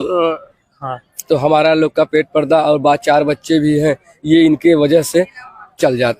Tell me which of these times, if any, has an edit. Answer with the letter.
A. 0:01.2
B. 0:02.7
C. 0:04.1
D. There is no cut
D